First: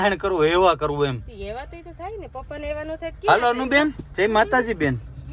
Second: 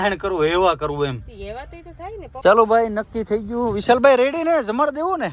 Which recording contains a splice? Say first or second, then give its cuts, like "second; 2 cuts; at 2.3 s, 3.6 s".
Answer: second; 1 cut; at 2.4 s